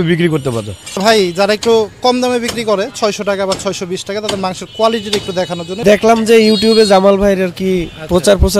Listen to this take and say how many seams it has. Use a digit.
2